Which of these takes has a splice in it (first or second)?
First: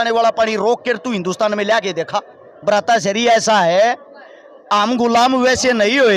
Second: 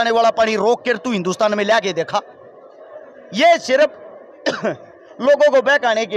first